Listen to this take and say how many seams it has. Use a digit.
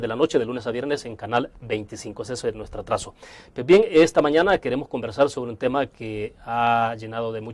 1